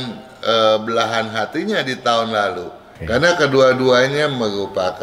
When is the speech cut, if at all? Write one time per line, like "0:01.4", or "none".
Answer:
0:02.9